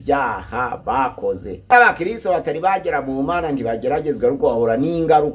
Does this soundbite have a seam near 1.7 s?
yes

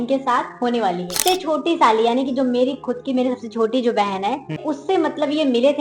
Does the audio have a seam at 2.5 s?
no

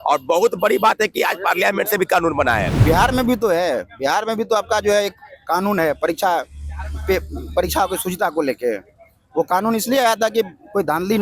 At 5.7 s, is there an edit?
no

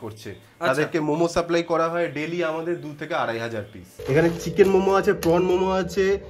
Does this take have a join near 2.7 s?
no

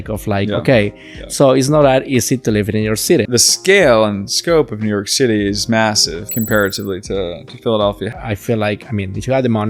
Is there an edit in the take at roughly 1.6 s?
no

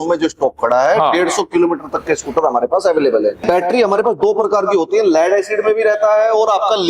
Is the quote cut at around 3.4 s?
yes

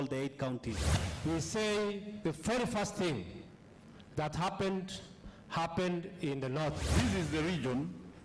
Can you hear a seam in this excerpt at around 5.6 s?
no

